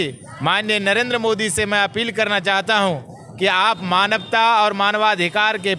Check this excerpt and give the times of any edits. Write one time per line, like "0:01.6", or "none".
none